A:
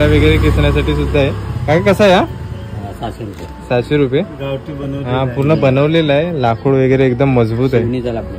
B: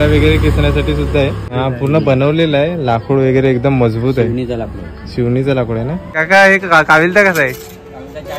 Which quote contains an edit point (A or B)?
B